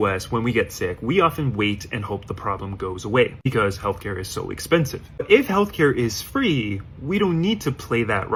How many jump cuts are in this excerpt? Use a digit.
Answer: 0